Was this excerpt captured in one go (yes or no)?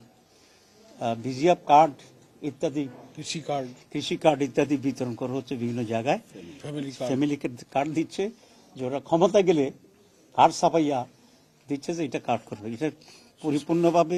yes